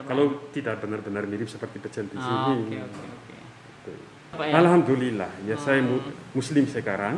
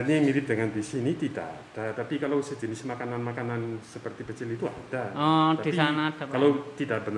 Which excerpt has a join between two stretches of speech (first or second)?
first